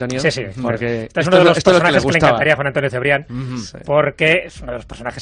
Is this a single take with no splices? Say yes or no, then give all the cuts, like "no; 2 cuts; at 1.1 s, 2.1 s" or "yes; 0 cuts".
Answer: no; 1 cut; at 3.2 s